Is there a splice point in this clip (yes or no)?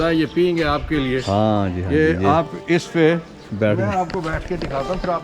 no